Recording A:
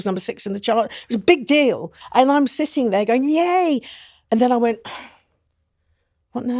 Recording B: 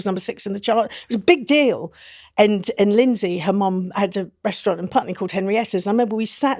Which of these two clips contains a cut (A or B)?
A